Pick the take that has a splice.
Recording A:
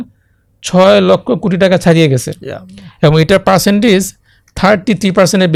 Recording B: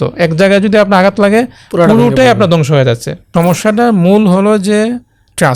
B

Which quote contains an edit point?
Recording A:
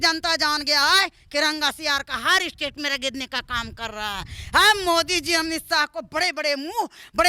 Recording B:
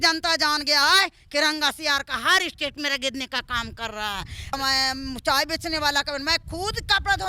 B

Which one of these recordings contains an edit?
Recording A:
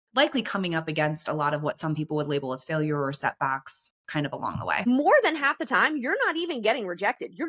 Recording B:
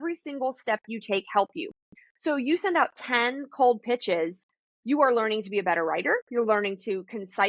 A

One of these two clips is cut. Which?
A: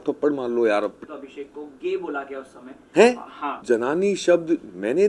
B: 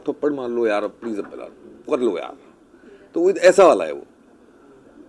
A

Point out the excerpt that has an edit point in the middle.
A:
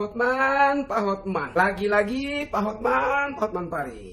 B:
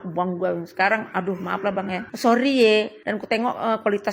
B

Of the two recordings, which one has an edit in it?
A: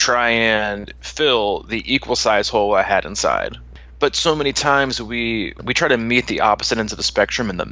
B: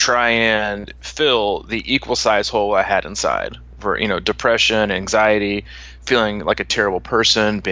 A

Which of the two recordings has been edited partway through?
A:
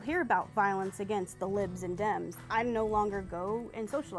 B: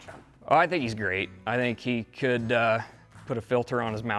A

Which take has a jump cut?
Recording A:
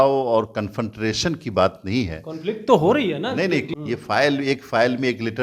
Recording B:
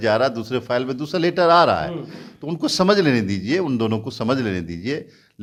A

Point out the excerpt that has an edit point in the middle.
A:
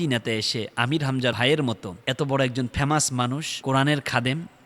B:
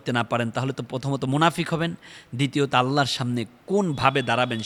A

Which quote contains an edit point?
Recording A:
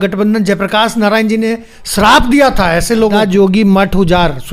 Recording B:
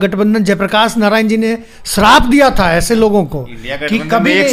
A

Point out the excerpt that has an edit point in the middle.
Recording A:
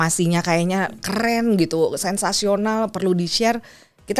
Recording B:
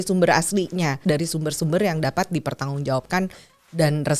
B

